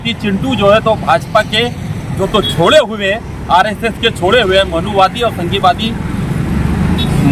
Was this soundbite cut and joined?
no; 0 cuts

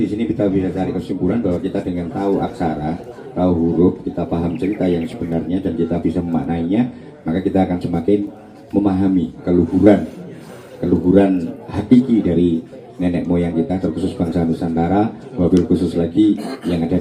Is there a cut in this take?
no; 0 cuts

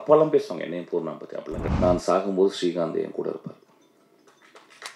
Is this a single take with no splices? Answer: no; 1 cut; at 1.6 s

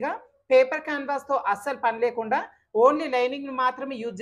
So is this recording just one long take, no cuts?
yes; 0 cuts

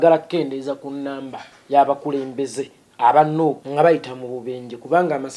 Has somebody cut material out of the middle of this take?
yes; 1 cut; at 3.6 s

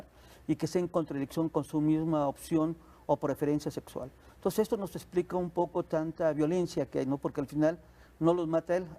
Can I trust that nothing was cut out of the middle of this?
yes; 0 cuts

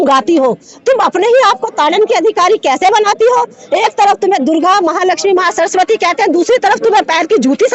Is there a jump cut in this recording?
no; 0 cuts

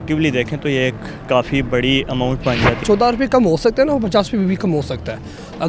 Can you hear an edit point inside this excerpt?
yes; 1 cut; at 2.8 s

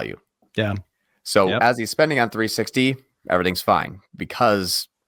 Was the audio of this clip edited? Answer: no; 0 cuts

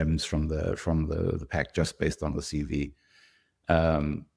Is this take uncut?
yes; 0 cuts

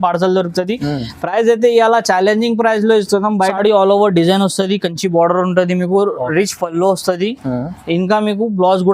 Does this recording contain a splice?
yes; 1 cut; at 3.5 s

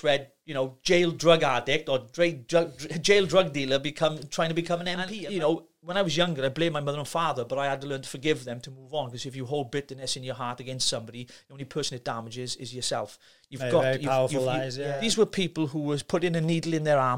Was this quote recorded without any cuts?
no; 2 cuts; at 5.1 s, 14.8 s

